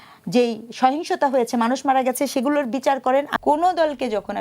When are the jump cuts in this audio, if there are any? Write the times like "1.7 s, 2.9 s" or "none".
3.3 s